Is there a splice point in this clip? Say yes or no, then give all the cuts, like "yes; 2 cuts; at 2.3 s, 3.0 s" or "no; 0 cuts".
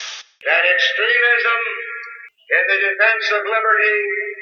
no; 0 cuts